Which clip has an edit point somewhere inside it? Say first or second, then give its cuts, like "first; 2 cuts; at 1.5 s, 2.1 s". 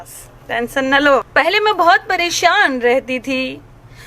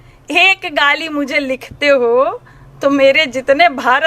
first; 1 cut; at 1.3 s